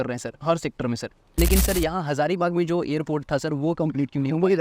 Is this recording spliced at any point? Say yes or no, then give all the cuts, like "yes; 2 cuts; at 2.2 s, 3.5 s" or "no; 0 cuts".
yes; 1 cut; at 1.3 s